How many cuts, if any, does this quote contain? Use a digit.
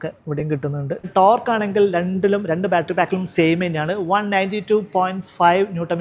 1